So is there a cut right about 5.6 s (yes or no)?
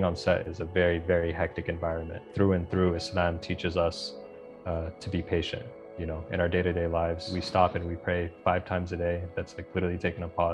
no